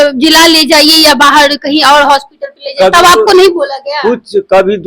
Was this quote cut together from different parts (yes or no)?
no